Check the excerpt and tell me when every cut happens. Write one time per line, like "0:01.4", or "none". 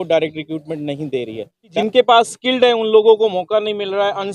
0:01.6